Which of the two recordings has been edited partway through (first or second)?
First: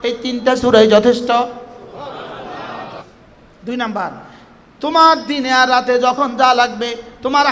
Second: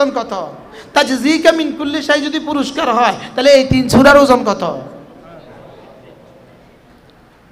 first